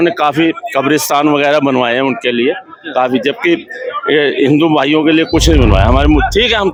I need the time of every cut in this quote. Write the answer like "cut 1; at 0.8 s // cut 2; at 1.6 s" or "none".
none